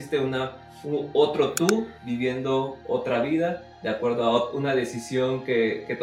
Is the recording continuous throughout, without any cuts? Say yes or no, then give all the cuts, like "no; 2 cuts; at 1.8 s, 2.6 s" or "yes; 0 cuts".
yes; 0 cuts